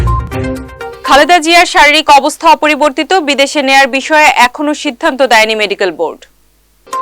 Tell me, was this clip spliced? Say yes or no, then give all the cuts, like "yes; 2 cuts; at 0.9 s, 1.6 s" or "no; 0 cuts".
yes; 1 cut; at 0.9 s